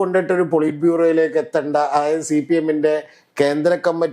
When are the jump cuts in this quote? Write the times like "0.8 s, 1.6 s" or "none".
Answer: none